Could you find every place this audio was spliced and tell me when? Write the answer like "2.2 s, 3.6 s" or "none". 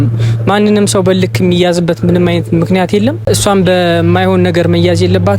3.3 s